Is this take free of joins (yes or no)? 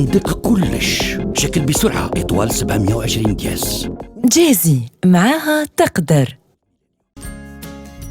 no